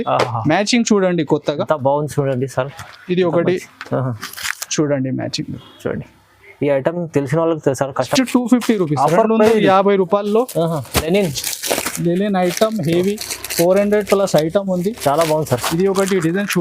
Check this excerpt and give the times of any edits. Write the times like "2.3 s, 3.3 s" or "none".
8.1 s